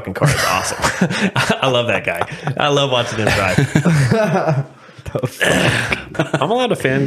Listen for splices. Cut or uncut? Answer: cut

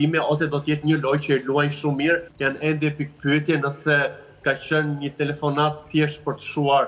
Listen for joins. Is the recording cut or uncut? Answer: cut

